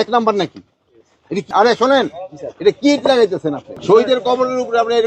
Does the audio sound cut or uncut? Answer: cut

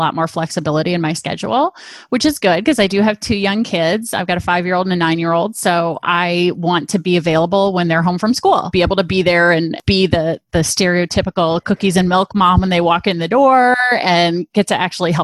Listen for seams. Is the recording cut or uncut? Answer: cut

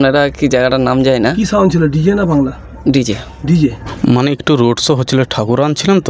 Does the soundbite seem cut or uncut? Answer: cut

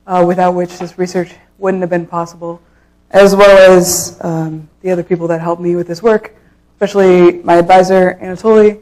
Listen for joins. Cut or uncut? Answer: uncut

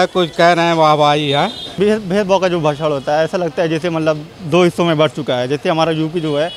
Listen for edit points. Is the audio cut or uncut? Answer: cut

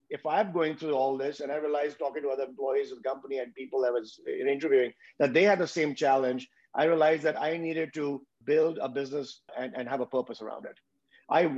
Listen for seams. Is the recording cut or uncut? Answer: cut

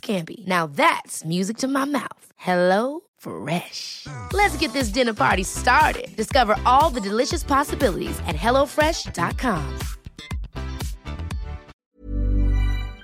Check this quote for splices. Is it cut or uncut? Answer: cut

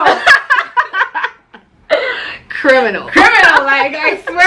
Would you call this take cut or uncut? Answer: uncut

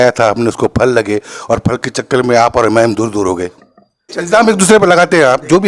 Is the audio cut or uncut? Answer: cut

